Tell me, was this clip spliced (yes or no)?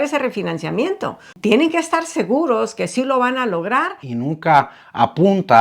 yes